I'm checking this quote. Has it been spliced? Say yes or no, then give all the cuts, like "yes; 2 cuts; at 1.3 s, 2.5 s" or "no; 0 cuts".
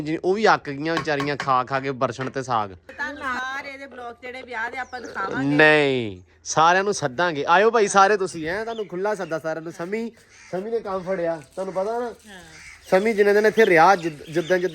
yes; 1 cut; at 3.4 s